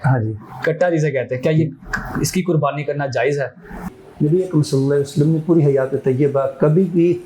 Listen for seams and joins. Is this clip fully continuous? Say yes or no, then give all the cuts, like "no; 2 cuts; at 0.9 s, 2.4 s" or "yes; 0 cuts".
no; 1 cut; at 4.0 s